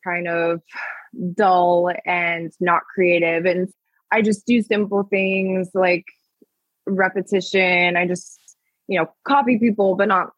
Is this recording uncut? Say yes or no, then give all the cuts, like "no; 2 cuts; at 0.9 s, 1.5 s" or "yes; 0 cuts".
no; 1 cut; at 3.7 s